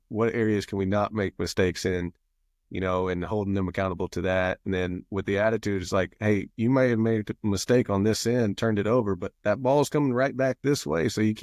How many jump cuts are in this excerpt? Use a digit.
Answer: 0